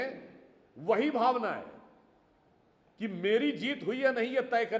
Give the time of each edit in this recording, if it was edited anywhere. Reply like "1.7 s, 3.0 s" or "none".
none